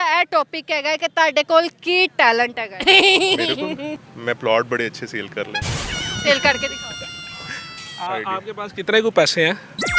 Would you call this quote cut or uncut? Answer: cut